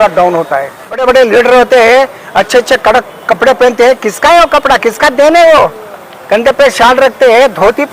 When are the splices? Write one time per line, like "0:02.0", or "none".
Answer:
0:01.0